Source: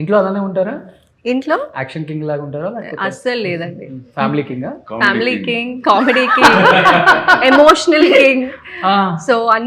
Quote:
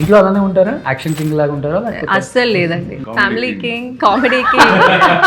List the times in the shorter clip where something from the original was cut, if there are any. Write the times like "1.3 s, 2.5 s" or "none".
0.9 s, 3.0 s

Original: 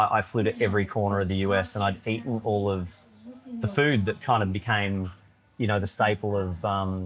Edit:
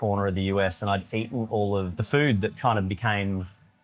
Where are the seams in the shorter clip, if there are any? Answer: 2.0 s

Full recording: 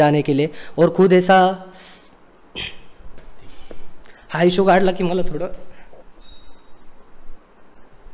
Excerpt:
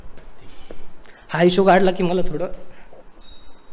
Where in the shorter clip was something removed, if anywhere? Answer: none

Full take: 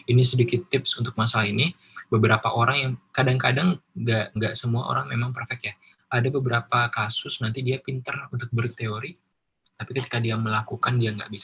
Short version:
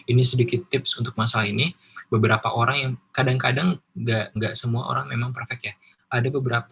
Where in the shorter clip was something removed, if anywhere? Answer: none

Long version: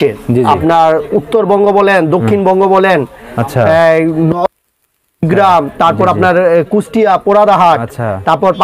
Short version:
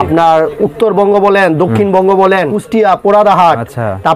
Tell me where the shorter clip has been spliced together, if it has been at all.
2.6 s

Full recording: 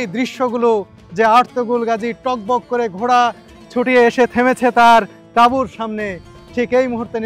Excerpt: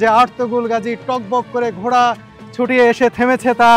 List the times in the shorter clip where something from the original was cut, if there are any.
none

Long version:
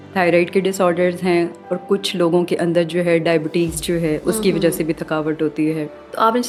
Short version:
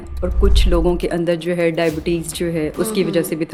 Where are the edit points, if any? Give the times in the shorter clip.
none

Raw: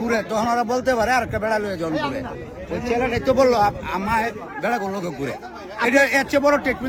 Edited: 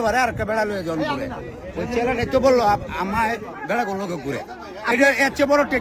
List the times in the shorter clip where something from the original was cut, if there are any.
none

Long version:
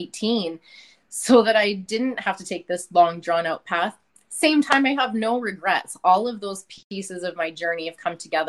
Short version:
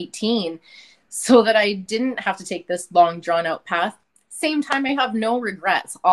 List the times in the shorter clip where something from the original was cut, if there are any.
none

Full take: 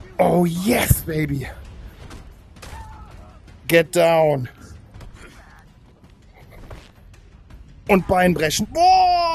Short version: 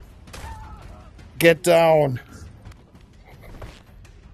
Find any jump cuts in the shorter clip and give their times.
2.7 s

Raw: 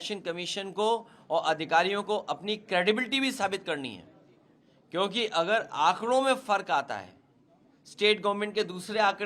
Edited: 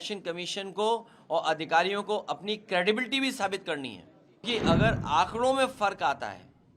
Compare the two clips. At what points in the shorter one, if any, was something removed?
4.4 s

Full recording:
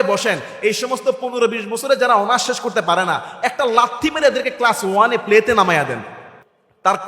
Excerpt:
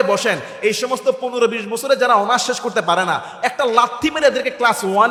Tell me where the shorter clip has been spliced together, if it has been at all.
none

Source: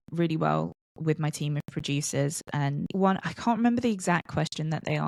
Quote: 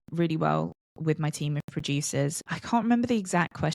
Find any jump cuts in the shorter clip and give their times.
2.5 s

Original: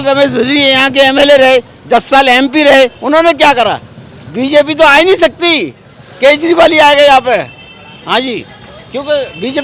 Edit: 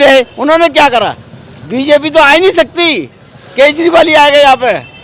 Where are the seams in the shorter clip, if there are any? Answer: none

